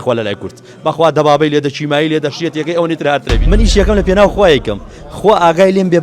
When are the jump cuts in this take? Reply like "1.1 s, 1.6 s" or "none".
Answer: 3.3 s